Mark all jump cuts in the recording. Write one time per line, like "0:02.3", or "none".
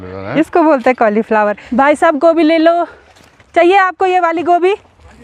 0:01.6